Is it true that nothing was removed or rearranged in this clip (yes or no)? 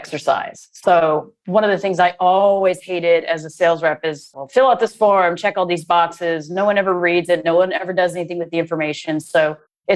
no